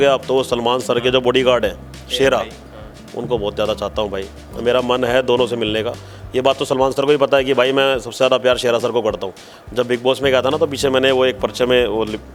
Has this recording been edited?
no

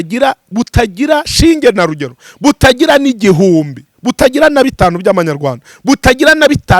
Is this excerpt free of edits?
yes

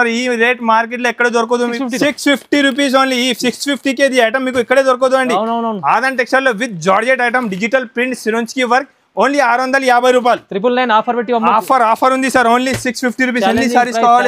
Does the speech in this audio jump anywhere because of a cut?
yes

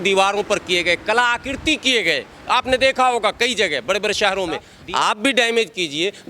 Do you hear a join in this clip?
yes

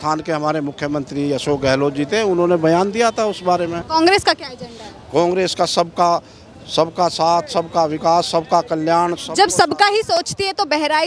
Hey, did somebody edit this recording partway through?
yes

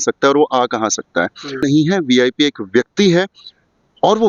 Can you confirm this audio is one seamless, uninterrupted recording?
no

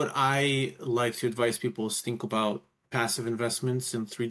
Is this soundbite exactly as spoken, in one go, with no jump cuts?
yes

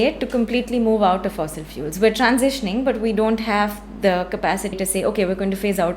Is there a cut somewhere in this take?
yes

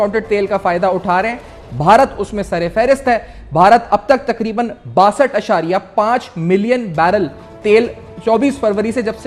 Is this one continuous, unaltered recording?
yes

